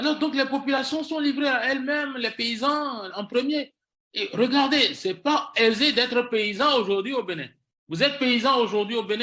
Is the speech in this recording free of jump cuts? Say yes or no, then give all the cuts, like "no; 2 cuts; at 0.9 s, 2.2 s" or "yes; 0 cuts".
yes; 0 cuts